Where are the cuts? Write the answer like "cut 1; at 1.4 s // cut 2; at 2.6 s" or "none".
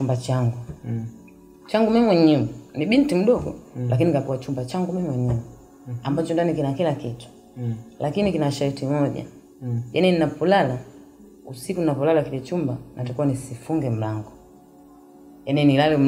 none

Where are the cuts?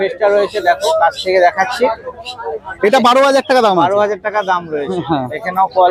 none

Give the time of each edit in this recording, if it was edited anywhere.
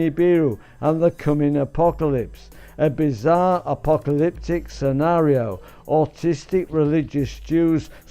cut 1; at 7.1 s

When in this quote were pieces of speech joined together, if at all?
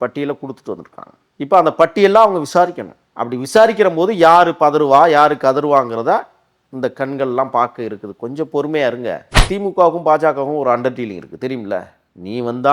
cut 1; at 9.4 s

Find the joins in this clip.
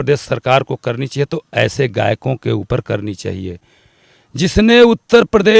none

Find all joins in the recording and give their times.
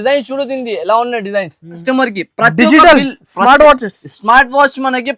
cut 1; at 1.8 s

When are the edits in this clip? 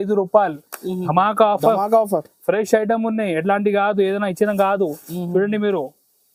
none

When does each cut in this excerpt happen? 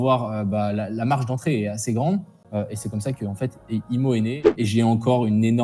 cut 1; at 2.4 s // cut 2; at 4.4 s

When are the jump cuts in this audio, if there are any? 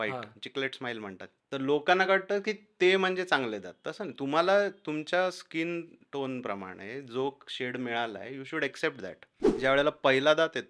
cut 1; at 1.3 s // cut 2; at 9.6 s

